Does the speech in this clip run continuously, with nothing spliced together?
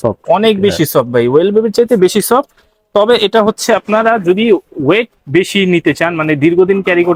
yes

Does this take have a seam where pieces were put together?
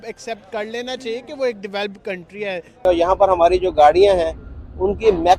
yes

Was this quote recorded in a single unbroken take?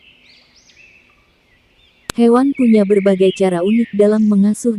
no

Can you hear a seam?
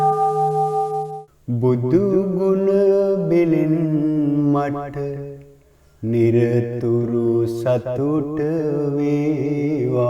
yes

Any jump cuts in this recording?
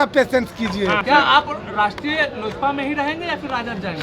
yes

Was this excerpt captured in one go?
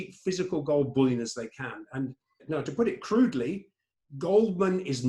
no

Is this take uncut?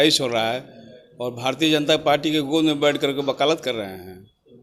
yes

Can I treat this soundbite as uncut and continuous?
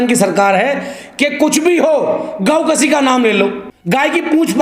no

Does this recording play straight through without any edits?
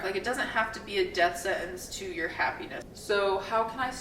no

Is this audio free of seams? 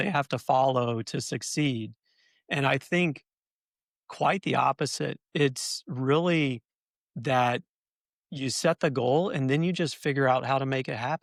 yes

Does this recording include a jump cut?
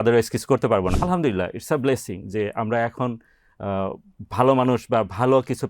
yes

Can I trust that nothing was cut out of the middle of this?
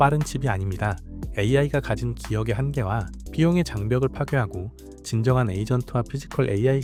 yes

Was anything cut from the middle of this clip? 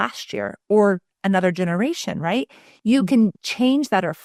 no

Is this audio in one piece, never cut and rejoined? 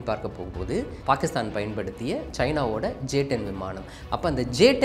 no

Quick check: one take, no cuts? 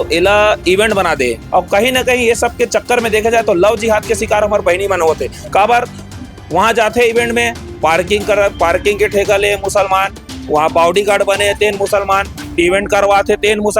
no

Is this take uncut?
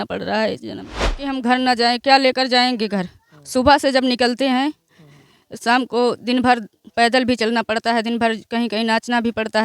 no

